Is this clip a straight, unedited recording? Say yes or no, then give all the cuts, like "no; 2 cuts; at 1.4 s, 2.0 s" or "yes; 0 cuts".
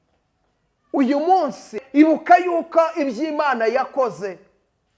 no; 1 cut; at 1.8 s